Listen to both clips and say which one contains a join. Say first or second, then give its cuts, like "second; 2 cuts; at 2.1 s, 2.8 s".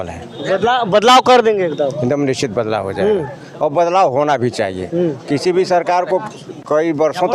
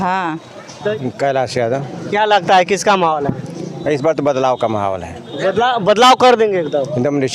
second; 1 cut; at 0.9 s